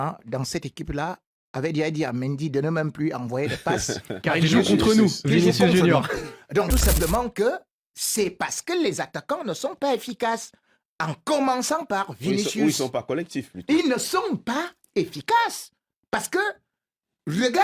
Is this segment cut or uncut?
cut